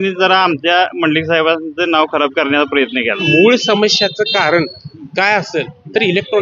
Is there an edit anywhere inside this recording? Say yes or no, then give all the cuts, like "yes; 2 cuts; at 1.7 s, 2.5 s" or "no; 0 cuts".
yes; 1 cut; at 3.2 s